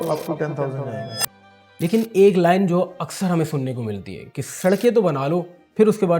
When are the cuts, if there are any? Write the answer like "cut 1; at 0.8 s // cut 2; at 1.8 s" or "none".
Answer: cut 1; at 1.3 s